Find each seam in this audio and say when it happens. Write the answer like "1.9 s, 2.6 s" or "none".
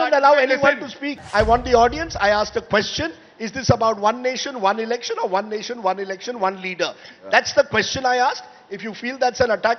1.1 s